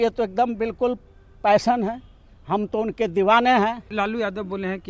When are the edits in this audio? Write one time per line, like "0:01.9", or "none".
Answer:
0:03.9